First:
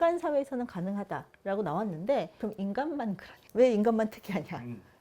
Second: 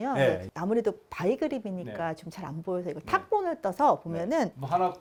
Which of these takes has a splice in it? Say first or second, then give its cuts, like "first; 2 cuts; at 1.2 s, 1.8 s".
first; 1 cut; at 2.3 s